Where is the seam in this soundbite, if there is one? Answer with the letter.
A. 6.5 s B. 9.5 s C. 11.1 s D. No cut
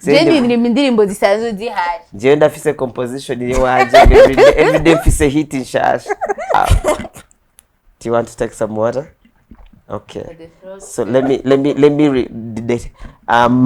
A